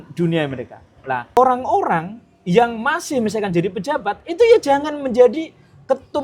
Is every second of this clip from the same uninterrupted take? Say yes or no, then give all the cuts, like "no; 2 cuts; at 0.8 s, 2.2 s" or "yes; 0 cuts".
no; 1 cut; at 1.4 s